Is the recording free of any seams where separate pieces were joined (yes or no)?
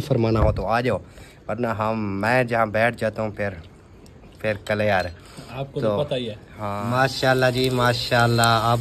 no